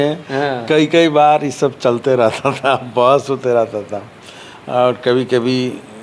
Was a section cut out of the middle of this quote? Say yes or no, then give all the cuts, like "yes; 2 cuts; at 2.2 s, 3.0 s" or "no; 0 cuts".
no; 0 cuts